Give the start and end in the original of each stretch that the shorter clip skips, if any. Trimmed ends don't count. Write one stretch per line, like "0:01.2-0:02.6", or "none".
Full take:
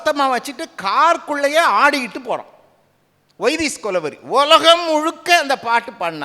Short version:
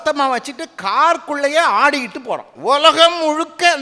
0:02.5-0:04.2